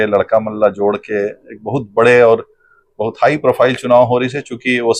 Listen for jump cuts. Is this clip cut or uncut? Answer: uncut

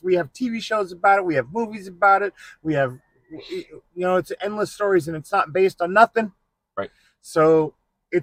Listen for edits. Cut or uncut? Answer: uncut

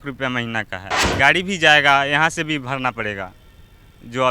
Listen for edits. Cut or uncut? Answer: cut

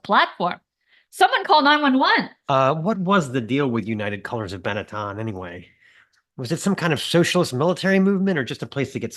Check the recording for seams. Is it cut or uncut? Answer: cut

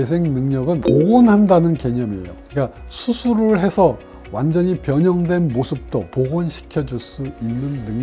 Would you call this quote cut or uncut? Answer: cut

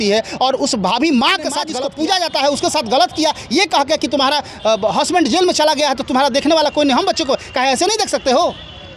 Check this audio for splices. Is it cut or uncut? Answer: cut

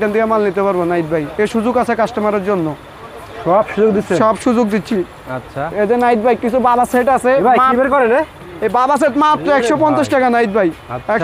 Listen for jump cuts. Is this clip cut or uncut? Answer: uncut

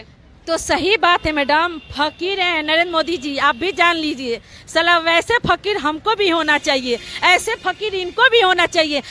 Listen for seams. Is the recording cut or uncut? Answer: uncut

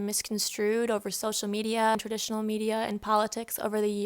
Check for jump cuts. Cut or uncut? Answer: cut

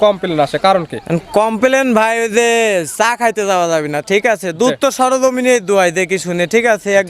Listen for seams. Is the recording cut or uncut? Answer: uncut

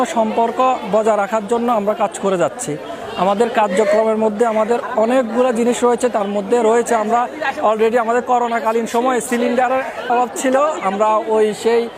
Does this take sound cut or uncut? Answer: uncut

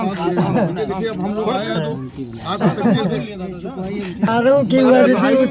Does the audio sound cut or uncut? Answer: cut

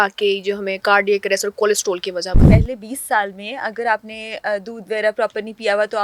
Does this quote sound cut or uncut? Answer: cut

